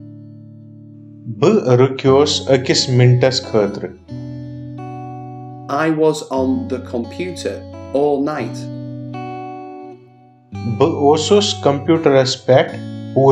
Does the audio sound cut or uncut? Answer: uncut